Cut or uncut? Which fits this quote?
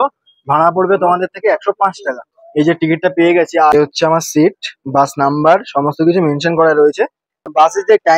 uncut